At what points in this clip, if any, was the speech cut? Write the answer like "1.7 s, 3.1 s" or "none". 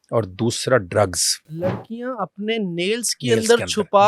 1.5 s